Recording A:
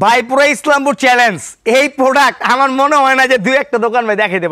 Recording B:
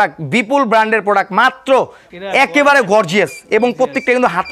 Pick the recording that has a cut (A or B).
B